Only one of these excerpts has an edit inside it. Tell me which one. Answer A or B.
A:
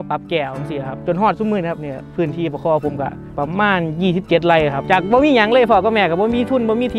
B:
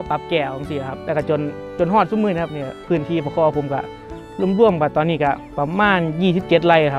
A